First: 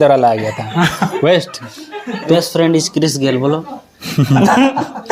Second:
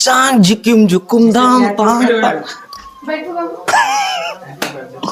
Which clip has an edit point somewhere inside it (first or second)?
first